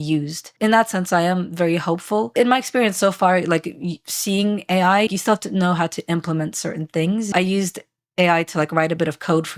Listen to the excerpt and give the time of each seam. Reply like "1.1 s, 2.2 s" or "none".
none